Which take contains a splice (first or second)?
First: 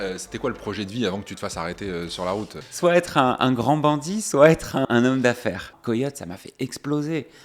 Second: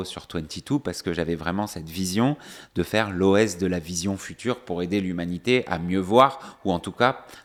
first